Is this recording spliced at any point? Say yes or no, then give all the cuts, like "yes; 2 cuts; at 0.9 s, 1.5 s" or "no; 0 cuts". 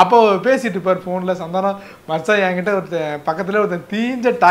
no; 0 cuts